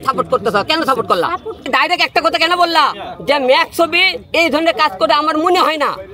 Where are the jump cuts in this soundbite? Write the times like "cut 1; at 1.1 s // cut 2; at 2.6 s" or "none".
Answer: cut 1; at 1.7 s